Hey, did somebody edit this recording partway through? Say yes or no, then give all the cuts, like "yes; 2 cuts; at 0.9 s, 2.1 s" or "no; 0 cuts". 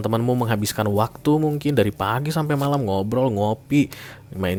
no; 0 cuts